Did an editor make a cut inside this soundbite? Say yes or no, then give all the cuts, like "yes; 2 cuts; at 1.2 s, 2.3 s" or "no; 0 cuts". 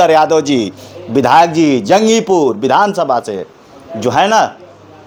no; 0 cuts